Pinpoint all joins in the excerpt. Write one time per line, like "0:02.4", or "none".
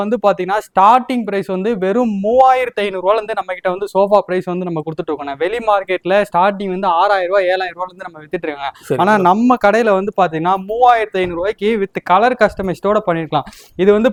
none